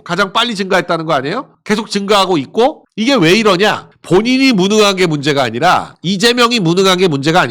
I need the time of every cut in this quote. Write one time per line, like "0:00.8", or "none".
none